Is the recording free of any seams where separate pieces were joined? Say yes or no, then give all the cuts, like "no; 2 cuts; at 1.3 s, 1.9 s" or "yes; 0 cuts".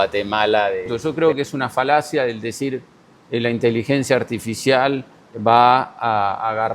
no; 1 cut; at 0.9 s